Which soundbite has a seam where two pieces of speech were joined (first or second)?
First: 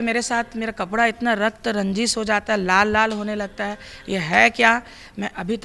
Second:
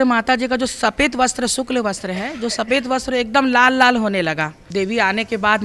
second